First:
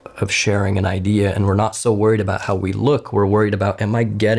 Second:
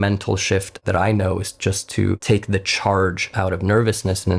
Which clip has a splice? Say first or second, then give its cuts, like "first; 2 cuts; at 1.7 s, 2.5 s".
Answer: second; 2 cuts; at 0.8 s, 2.2 s